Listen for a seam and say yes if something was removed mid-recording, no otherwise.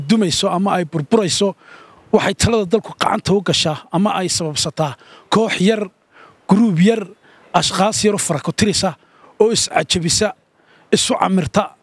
no